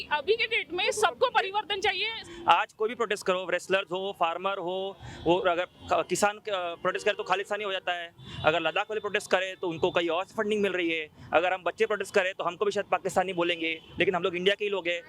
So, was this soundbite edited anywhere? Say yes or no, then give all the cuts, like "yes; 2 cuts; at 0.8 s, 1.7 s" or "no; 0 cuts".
yes; 1 cut; at 2.2 s